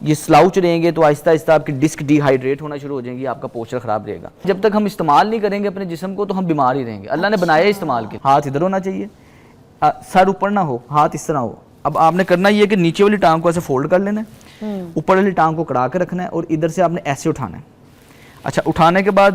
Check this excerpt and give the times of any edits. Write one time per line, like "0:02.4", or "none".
0:04.4
0:08.1